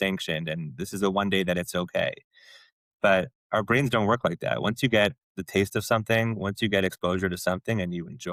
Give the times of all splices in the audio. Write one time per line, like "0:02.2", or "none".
none